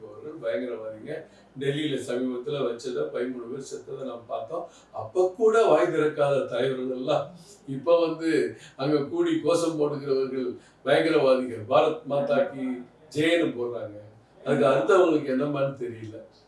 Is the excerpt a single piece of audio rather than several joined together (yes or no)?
yes